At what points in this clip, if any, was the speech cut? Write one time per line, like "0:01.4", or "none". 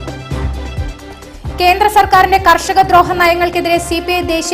0:01.0